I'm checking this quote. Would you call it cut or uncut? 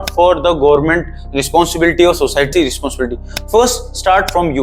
uncut